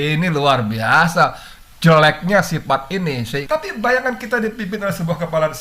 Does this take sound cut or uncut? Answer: cut